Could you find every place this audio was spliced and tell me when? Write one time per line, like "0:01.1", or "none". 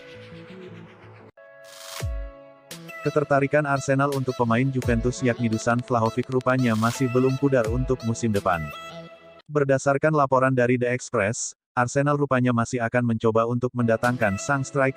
0:01.3